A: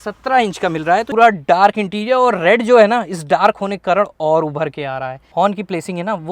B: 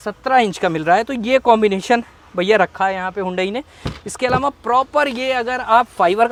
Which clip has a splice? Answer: A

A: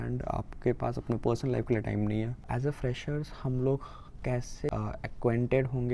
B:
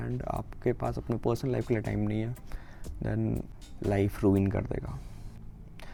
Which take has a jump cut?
A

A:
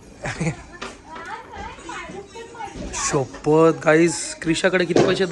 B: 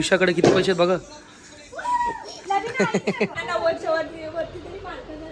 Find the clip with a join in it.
B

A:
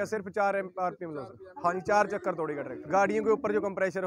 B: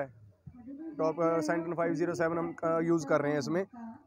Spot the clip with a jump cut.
A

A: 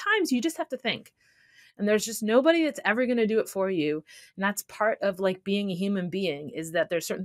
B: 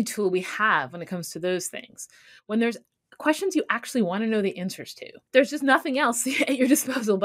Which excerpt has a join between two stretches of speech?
B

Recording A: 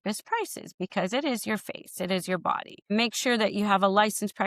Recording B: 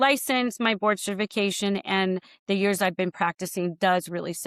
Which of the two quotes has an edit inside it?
A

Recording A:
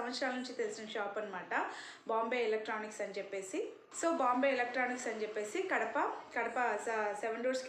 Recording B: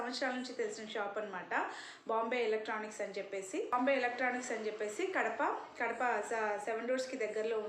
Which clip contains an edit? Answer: B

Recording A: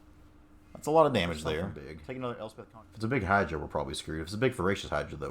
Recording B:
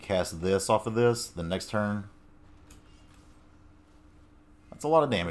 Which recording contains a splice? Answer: A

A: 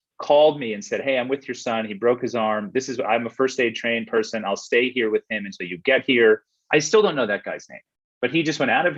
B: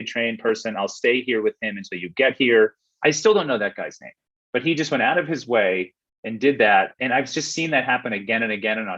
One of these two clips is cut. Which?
B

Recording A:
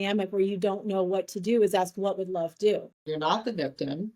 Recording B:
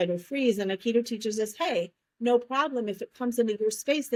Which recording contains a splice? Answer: A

